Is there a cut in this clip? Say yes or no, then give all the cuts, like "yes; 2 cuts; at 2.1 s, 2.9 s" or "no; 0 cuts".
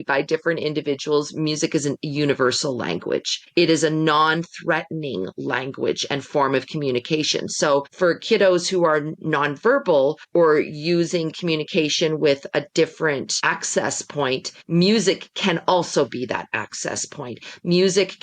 yes; 5 cuts; at 3.4 s, 7.9 s, 10.2 s, 13.3 s, 14.5 s